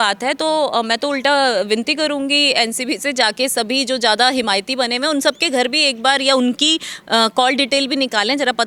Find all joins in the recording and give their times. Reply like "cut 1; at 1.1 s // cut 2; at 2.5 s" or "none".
none